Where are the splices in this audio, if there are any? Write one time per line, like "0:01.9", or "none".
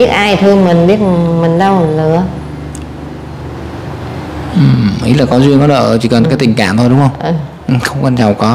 none